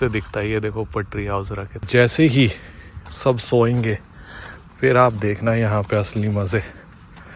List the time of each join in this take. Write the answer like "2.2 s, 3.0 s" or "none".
1.9 s